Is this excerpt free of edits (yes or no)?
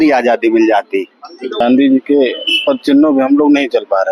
no